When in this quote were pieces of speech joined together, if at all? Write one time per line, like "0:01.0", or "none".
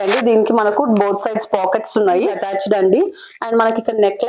0:02.5